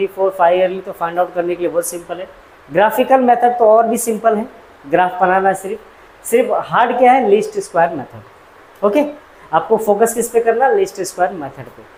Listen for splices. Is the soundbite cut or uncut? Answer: uncut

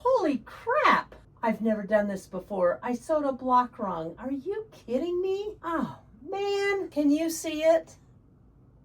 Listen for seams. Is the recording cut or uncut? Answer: cut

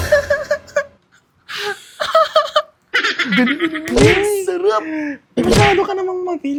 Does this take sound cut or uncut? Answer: uncut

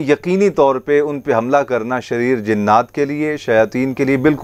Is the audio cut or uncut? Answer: uncut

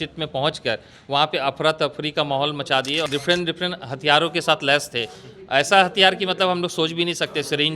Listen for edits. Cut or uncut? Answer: cut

